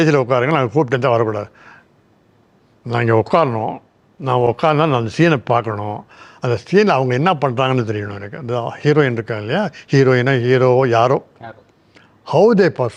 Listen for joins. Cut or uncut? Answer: uncut